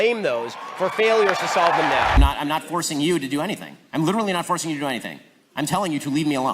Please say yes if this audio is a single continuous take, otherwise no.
no